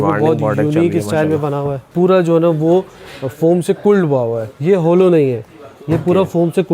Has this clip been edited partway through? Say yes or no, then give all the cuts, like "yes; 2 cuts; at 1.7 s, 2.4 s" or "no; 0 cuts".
yes; 2 cuts; at 1.9 s, 4.5 s